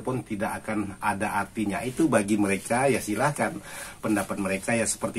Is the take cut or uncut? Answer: uncut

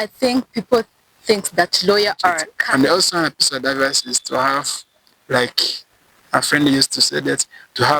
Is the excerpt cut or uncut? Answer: cut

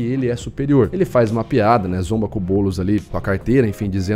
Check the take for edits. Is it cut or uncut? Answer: cut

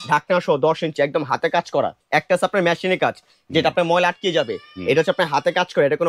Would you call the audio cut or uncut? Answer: cut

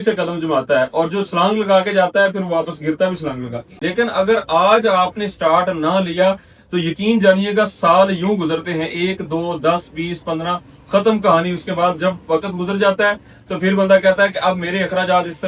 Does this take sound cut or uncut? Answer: cut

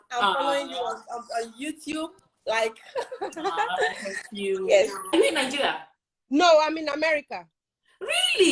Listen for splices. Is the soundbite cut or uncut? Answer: cut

